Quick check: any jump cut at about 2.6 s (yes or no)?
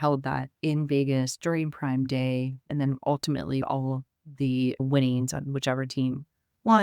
yes